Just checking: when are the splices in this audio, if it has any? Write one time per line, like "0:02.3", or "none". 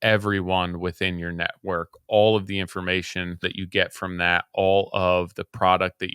0:03.4